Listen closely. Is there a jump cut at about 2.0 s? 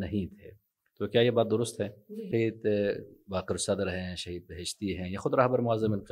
yes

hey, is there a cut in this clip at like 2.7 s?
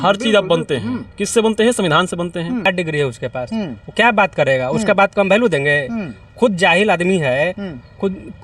yes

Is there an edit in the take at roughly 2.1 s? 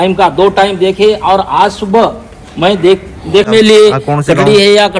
no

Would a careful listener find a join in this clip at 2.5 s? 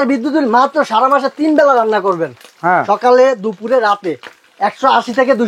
no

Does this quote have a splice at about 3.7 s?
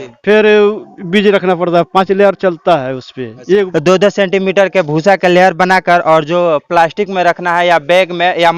yes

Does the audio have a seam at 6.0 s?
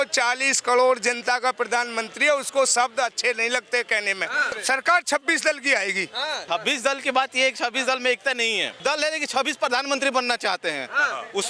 no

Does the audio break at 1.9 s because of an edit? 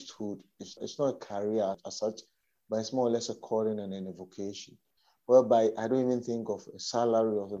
yes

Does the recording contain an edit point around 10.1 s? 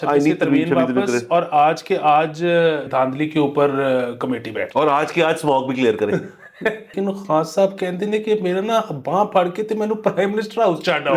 no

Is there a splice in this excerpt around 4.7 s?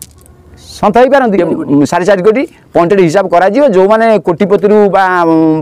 no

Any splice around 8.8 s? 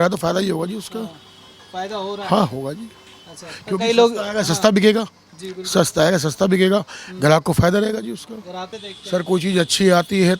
yes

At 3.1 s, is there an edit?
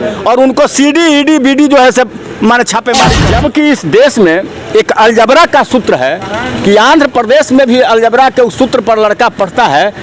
yes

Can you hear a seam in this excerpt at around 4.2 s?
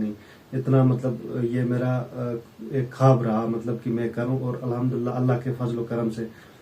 no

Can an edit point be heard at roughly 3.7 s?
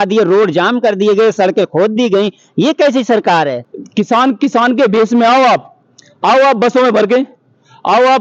yes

